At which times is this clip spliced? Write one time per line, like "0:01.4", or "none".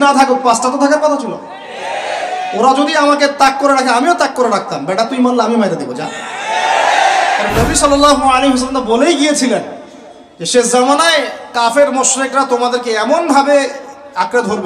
0:07.5